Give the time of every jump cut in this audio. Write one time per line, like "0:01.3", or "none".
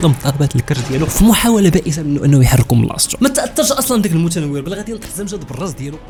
none